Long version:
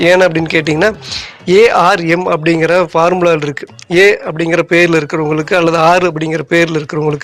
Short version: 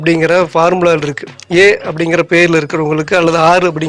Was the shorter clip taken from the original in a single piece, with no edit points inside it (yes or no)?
yes